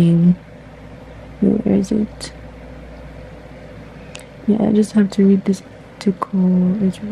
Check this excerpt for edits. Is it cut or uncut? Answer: uncut